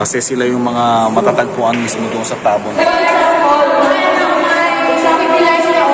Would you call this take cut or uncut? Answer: cut